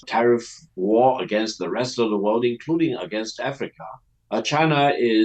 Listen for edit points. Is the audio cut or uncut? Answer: uncut